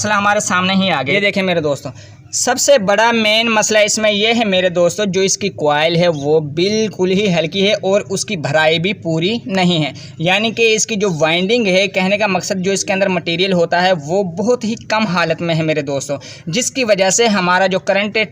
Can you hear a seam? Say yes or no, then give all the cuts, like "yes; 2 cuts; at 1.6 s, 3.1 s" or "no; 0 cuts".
yes; 1 cut; at 1.1 s